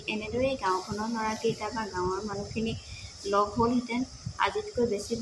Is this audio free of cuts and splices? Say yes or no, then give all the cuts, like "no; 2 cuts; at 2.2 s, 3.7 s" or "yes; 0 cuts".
yes; 0 cuts